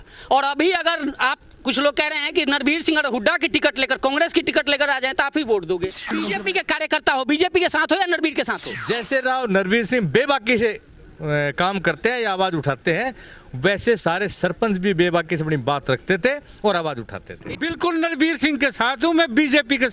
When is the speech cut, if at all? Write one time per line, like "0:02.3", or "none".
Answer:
0:06.1
0:08.6
0:17.5